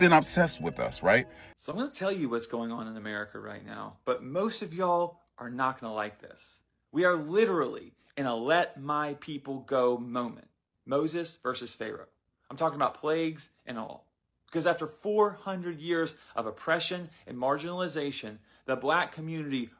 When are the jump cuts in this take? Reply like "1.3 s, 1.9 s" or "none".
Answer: 1.4 s

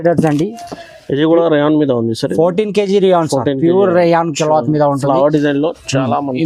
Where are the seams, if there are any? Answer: none

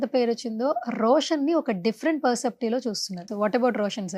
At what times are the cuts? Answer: 3.3 s

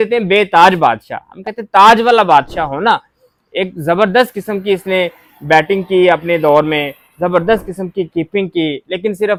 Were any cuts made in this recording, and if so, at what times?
none

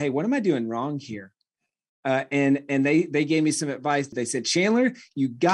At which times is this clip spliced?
4.1 s

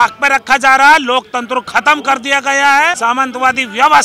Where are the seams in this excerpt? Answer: 3.0 s

